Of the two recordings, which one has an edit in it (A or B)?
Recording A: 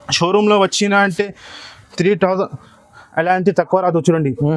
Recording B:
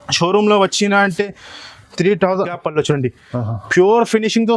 B